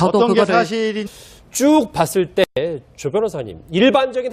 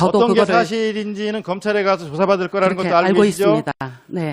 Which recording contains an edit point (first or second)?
second